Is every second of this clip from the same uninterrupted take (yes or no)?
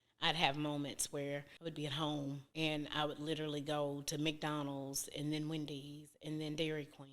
no